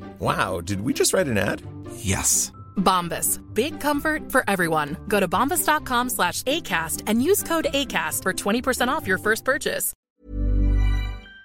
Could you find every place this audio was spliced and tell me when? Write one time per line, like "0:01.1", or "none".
0:10.1